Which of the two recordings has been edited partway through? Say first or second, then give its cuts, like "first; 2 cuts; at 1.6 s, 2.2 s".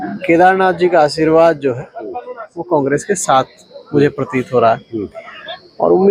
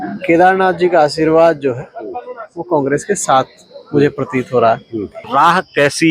second; 1 cut; at 5.2 s